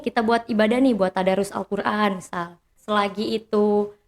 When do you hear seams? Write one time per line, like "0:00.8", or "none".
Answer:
0:02.7